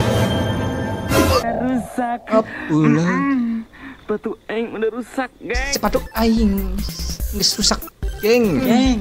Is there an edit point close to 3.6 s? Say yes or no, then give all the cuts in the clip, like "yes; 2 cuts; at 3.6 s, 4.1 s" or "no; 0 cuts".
no; 1 cut; at 1.4 s